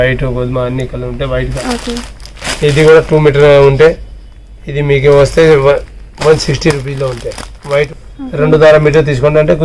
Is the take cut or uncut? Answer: cut